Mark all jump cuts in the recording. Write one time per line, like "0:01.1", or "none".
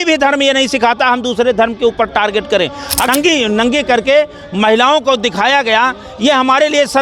0:03.1